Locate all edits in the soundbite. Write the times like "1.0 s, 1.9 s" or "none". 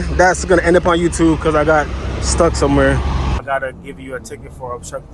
3.4 s